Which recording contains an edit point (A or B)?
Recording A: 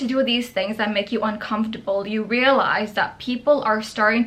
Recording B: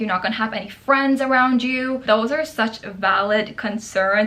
B